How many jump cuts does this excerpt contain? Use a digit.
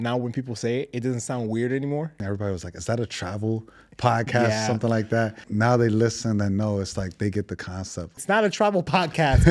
3